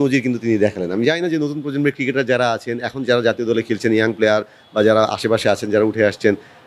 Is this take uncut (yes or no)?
yes